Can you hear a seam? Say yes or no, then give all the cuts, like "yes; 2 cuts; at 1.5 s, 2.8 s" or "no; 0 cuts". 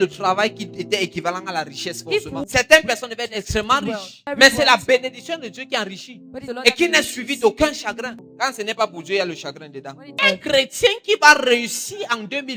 yes; 5 cuts; at 2.4 s, 4.3 s, 6.4 s, 8.2 s, 10.2 s